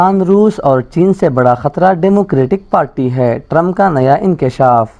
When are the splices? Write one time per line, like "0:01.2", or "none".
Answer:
none